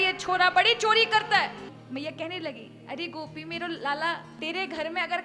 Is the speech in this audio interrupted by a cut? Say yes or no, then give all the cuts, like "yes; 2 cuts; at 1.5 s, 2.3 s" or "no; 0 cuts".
yes; 2 cuts; at 1.7 s, 4.3 s